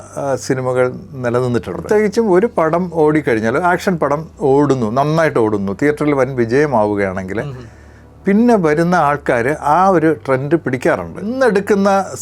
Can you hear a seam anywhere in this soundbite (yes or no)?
yes